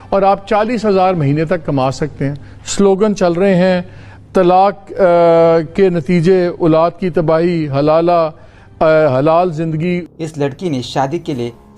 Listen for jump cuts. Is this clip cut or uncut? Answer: cut